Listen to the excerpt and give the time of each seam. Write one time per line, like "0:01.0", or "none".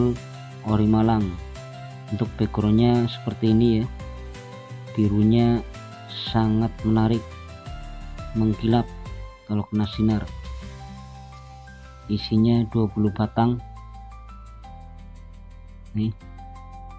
0:14.0
0:15.7